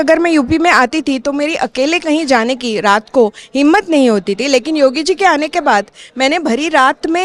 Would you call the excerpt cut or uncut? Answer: uncut